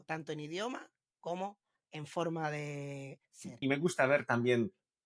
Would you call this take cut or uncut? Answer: cut